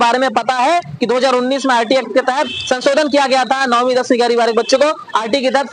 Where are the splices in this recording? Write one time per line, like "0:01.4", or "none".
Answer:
none